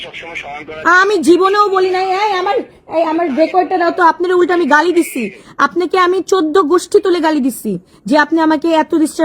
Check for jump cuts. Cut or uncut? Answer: uncut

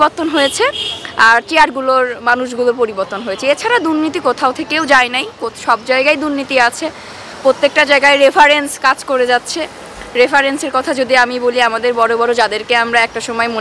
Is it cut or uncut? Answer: uncut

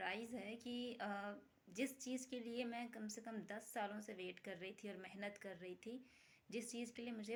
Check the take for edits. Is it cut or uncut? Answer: uncut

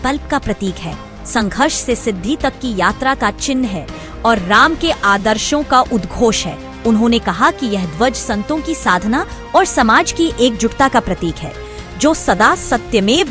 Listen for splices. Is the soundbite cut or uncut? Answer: uncut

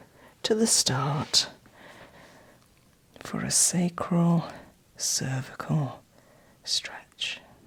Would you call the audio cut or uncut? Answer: uncut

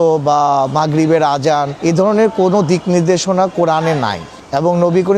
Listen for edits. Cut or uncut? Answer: cut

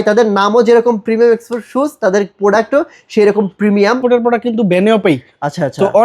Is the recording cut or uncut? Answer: cut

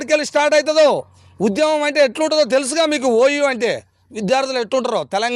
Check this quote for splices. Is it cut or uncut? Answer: uncut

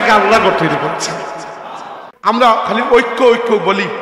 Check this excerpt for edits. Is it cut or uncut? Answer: cut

